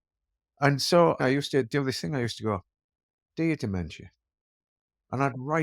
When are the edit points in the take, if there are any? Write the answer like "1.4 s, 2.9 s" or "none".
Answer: 1.2 s